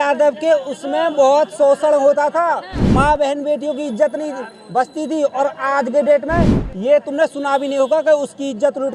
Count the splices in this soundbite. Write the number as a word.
zero